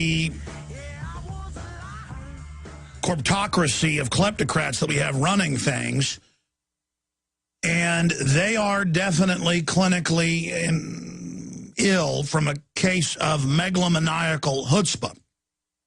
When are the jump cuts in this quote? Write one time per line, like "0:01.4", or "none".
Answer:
0:09.8